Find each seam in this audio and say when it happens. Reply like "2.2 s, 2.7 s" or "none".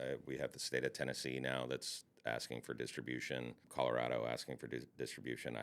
3.6 s